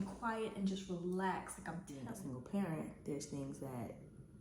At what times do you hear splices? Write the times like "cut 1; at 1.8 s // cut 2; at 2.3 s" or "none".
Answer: cut 1; at 1.9 s